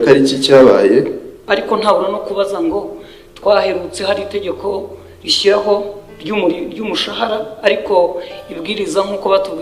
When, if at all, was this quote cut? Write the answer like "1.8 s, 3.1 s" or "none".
1.4 s